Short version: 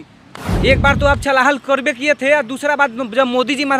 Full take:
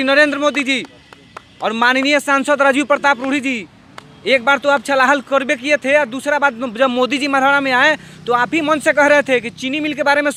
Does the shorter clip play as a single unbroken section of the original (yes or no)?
yes